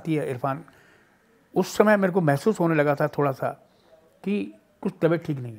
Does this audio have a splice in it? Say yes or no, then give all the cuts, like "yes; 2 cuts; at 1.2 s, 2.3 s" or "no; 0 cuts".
no; 0 cuts